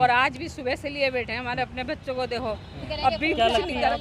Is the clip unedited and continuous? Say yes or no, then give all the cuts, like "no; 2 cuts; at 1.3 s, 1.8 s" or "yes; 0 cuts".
yes; 0 cuts